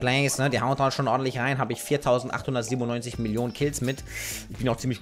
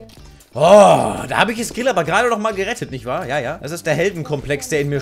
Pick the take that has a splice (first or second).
second